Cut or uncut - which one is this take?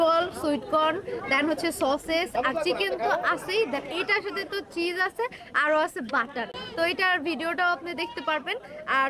uncut